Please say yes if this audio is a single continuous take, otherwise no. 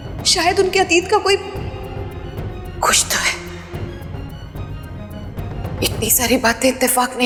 yes